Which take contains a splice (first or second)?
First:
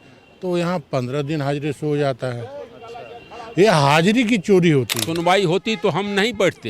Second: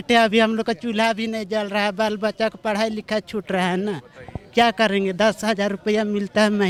first